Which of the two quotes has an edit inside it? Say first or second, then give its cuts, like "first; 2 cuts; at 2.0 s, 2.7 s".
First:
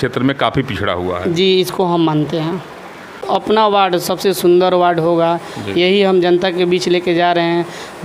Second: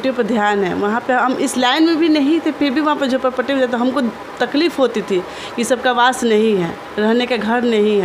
first; 1 cut; at 3.2 s